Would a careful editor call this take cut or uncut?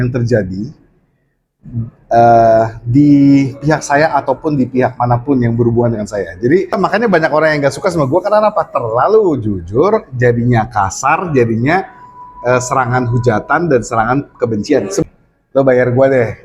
cut